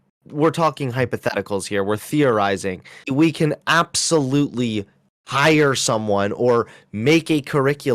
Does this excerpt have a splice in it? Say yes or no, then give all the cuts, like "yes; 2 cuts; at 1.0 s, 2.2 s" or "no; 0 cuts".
yes; 1 cut; at 3.1 s